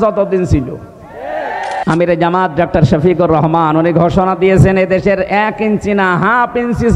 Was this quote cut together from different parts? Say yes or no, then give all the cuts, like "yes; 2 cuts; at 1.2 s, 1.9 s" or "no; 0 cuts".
yes; 1 cut; at 1.8 s